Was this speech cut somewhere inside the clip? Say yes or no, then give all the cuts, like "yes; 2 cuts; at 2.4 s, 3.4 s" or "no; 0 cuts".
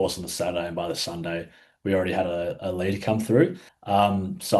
yes; 1 cut; at 3.7 s